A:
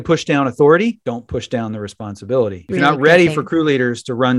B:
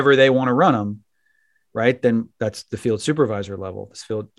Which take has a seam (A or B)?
A